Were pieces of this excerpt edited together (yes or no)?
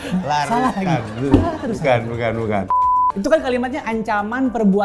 yes